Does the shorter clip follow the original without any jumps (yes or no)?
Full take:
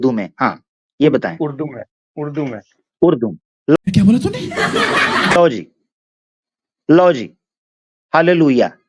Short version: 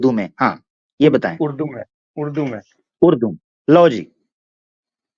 no